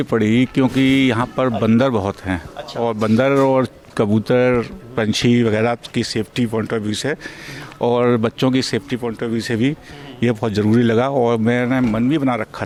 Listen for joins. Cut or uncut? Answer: uncut